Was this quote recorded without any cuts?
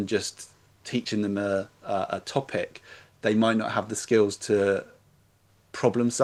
yes; 0 cuts

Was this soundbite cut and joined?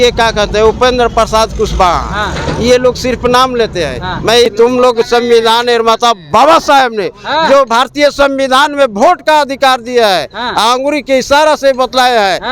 yes; 1 cut; at 4.5 s

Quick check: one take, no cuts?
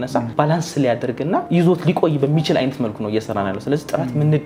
yes; 0 cuts

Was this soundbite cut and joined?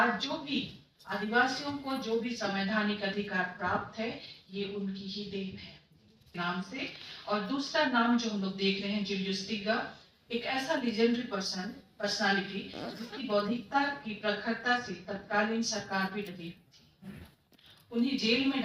yes; 1 cut; at 6.4 s

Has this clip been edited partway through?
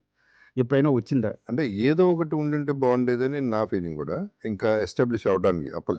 yes; 2 cuts; at 1.3 s, 4.4 s

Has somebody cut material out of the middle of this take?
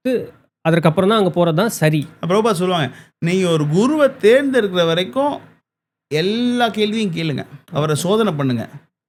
no; 0 cuts

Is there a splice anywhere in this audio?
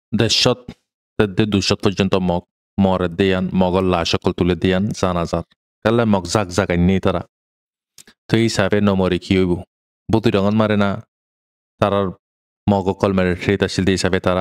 no; 0 cuts

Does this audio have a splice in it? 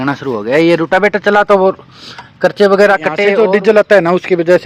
yes; 1 cut; at 3.2 s

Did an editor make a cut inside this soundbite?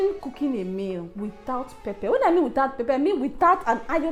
no; 0 cuts

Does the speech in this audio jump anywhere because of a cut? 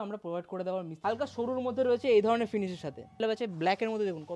yes; 2 cuts; at 0.9 s, 3.2 s

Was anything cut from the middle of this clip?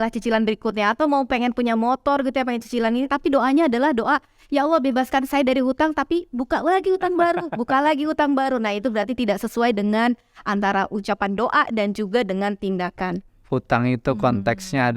no; 0 cuts

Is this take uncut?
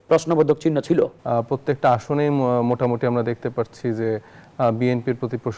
no; 1 cut; at 1.2 s

